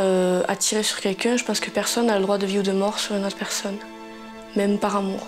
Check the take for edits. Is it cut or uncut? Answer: cut